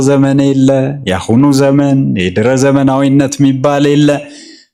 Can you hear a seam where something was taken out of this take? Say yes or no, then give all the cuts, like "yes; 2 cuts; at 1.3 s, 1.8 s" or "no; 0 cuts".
no; 0 cuts